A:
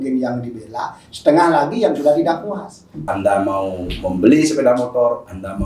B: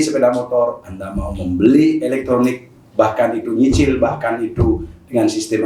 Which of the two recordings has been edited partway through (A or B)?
A